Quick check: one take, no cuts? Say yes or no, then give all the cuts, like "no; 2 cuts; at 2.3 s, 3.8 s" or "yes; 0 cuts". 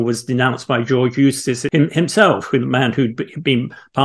no; 1 cut; at 1.6 s